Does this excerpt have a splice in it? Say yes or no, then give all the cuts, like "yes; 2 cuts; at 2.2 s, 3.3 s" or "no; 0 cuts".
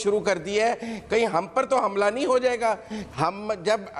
yes; 1 cut; at 2.9 s